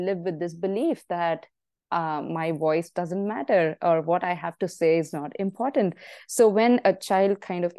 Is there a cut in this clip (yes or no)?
no